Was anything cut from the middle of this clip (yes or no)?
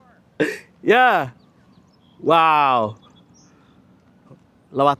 no